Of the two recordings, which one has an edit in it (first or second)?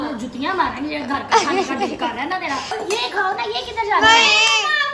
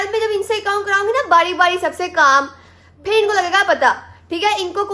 first